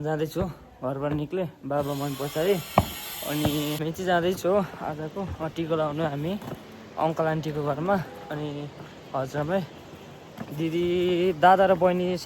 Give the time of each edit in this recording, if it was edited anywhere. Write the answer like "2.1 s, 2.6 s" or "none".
3.8 s